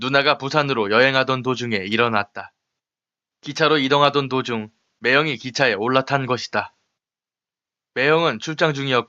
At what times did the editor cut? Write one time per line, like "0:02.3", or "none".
0:06.8